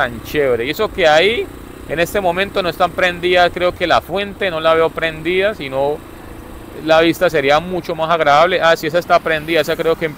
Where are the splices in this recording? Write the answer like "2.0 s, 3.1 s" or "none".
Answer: none